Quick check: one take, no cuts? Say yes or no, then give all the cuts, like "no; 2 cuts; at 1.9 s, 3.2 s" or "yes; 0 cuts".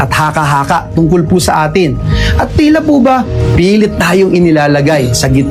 yes; 0 cuts